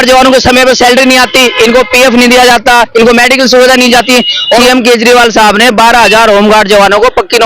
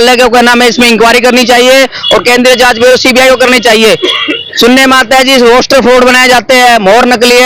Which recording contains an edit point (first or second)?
first